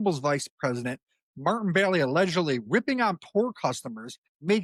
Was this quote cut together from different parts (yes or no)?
no